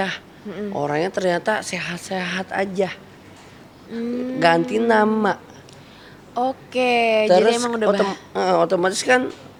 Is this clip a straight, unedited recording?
yes; 0 cuts

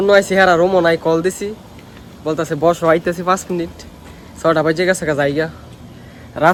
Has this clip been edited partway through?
no; 0 cuts

